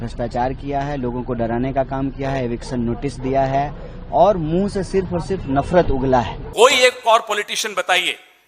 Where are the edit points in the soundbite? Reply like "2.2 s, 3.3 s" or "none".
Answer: 6.4 s